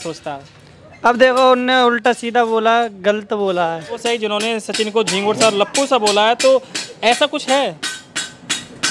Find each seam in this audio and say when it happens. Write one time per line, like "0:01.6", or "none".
0:04.0